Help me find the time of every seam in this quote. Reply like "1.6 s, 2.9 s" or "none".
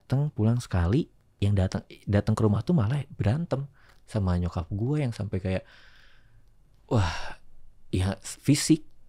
none